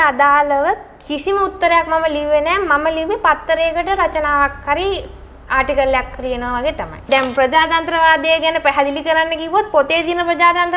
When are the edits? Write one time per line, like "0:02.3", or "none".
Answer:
0:07.1